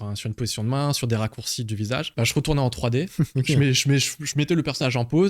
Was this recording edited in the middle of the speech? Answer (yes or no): yes